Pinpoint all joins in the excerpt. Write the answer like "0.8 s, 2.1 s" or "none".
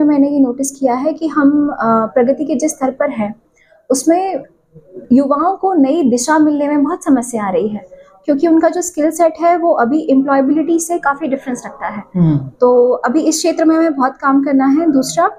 none